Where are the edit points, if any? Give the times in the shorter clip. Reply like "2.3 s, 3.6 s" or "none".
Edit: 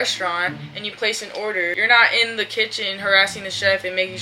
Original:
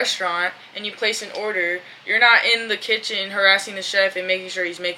1.8 s